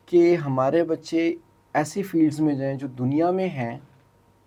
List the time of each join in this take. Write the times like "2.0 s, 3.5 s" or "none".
none